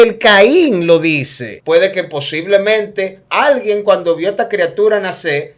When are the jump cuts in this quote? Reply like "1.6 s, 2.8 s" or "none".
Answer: 1.5 s